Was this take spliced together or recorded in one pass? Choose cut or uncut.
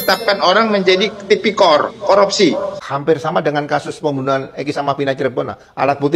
cut